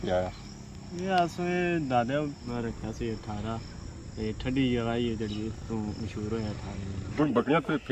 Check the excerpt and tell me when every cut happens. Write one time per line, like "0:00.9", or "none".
0:02.4
0:07.1